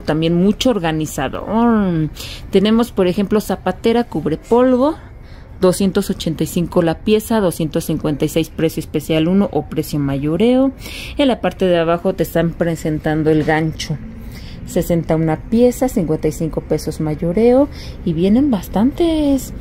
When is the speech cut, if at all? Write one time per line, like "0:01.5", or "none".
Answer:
none